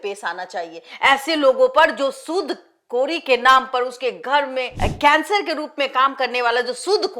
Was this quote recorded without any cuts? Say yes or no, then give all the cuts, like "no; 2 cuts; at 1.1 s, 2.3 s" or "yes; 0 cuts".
no; 1 cut; at 4.8 s